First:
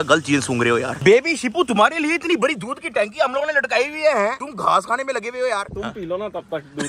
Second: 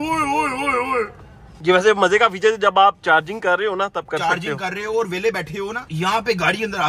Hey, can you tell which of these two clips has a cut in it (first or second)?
first